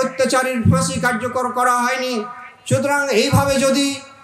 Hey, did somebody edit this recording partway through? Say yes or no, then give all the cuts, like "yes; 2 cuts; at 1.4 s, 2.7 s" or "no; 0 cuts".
no; 0 cuts